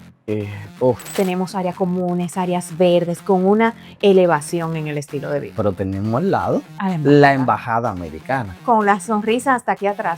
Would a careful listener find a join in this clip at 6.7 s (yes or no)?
no